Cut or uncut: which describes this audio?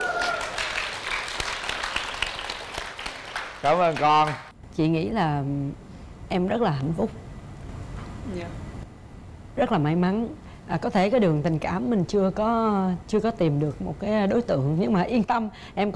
uncut